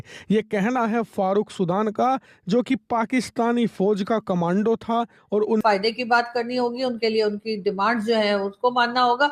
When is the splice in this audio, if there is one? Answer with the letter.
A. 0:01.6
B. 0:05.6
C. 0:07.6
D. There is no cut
B